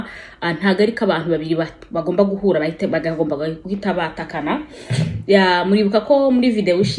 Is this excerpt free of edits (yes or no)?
yes